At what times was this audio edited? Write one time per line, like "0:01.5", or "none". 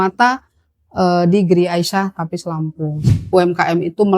0:03.1